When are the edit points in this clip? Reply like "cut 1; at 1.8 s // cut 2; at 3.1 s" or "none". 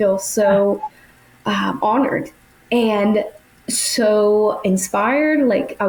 none